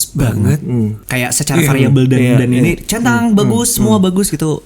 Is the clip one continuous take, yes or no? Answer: no